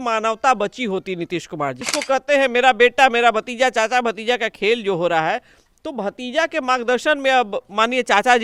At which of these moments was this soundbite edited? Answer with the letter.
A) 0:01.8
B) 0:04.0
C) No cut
A